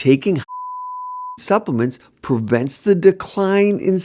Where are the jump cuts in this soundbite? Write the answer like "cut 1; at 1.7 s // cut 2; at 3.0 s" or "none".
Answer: none